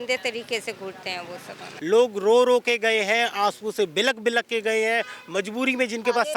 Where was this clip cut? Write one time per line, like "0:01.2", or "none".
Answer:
0:01.6